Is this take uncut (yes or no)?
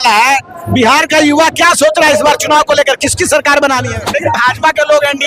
no